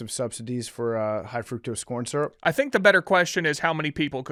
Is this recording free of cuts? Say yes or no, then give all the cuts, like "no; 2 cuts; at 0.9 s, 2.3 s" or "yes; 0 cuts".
yes; 0 cuts